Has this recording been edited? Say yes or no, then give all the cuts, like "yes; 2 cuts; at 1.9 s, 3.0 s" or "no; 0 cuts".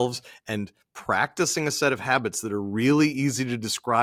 no; 0 cuts